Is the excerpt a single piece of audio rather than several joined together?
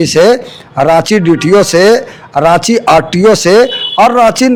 yes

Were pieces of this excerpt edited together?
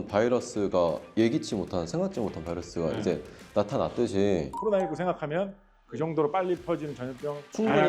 no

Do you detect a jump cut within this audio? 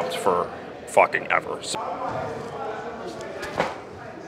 yes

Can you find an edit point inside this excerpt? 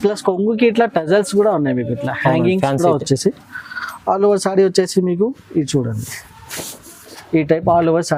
no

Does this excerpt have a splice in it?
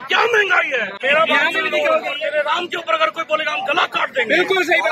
yes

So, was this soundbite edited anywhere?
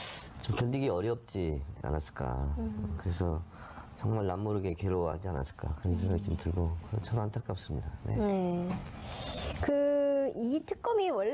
no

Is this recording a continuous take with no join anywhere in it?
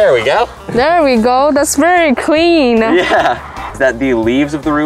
no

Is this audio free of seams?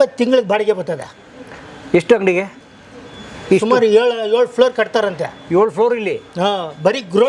yes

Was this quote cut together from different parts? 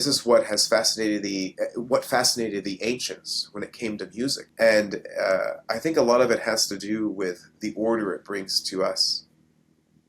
yes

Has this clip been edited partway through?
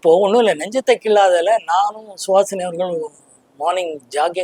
no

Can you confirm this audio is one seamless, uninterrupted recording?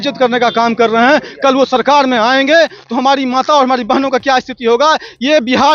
yes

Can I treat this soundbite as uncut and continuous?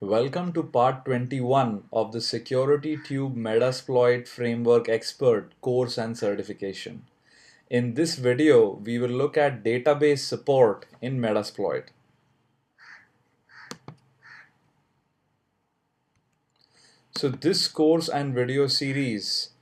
yes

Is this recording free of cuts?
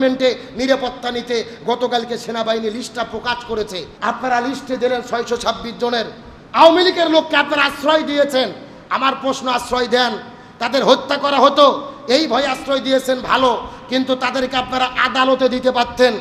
no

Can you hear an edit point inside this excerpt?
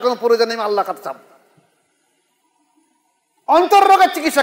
yes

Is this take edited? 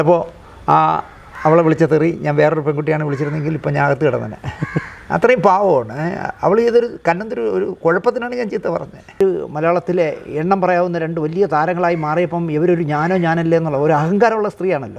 yes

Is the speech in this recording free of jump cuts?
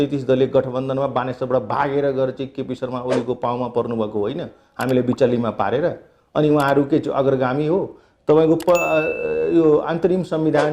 yes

